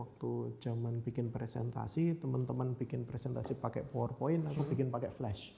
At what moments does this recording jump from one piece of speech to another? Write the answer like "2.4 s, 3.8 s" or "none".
none